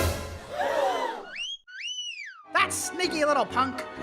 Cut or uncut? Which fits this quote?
uncut